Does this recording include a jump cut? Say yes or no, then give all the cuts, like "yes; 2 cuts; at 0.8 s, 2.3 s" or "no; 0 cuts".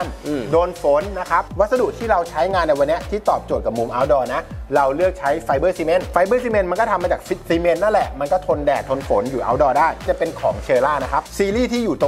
no; 0 cuts